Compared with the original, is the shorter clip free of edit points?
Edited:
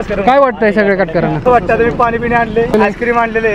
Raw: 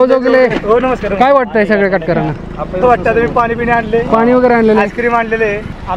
no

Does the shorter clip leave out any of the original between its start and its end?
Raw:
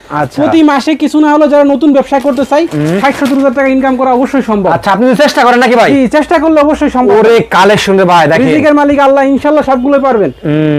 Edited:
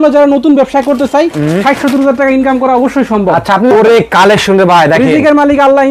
yes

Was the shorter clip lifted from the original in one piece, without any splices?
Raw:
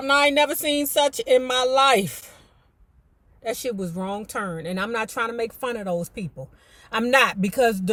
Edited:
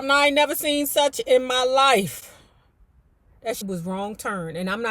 no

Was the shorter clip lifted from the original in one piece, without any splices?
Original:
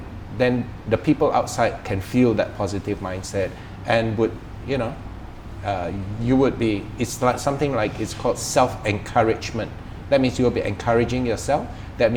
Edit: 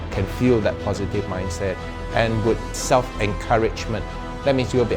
no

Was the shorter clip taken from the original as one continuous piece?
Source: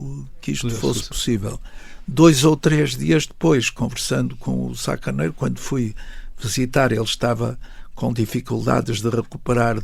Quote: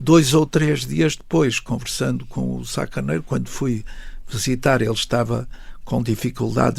yes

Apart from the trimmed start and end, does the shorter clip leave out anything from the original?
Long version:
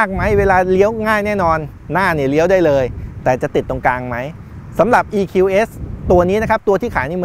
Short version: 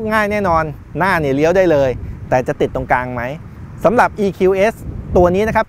no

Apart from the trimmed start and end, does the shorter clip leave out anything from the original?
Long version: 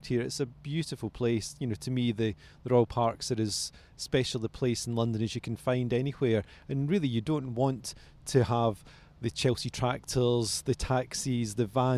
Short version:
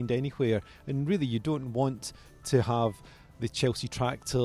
no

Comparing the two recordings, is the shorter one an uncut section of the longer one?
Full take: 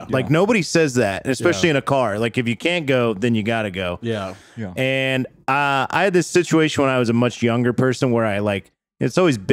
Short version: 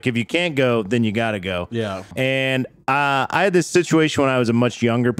no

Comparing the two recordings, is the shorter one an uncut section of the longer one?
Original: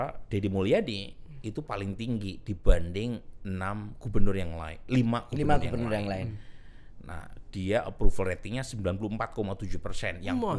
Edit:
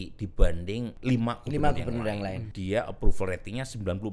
no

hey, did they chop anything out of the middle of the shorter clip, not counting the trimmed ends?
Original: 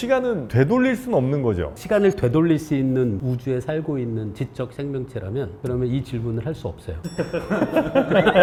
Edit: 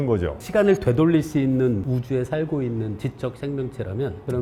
no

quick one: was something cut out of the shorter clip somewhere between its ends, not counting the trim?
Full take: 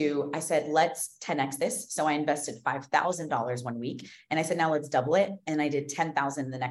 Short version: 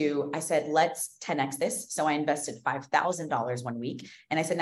no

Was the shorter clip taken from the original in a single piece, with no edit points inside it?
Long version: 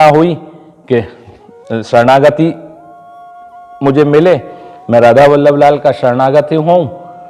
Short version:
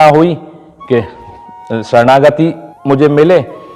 no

